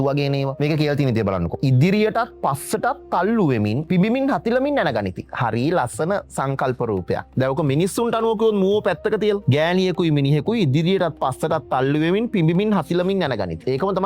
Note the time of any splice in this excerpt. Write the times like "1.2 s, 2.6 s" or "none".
none